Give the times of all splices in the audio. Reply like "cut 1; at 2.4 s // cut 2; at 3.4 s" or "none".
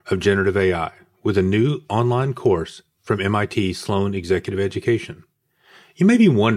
none